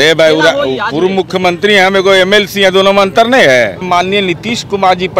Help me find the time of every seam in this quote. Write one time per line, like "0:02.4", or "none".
0:03.8